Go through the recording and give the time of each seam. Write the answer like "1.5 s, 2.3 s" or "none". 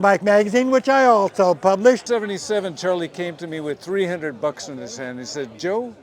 2.0 s